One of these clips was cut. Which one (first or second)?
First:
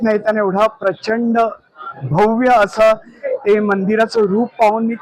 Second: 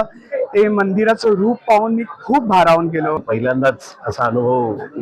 second